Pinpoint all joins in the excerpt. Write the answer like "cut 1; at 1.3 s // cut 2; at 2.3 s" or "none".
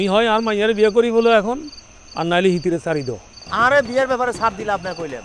cut 1; at 3.5 s